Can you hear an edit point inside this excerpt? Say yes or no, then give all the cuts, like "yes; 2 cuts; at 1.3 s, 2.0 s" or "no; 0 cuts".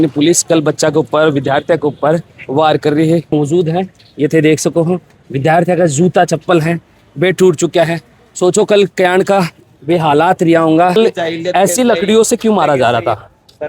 yes; 2 cuts; at 3.3 s, 11.0 s